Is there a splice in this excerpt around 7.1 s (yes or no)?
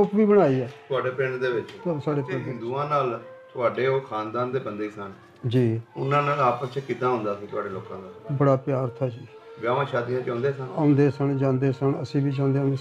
no